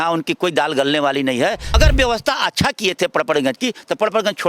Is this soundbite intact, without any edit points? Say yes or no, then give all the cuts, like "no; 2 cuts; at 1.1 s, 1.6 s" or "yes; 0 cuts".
no; 1 cut; at 1.7 s